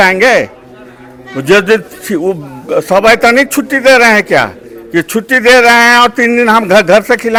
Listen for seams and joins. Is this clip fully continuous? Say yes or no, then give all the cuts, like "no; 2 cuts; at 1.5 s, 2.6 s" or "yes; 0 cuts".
yes; 0 cuts